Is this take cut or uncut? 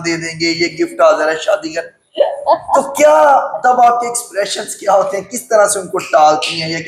uncut